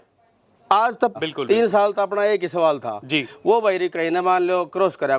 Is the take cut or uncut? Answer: cut